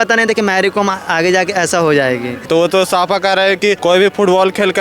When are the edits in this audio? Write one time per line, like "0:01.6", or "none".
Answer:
0:02.5
0:03.8